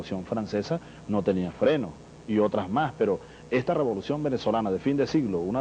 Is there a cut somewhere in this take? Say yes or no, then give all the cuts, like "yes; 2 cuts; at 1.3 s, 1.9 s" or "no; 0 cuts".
yes; 1 cut; at 3.5 s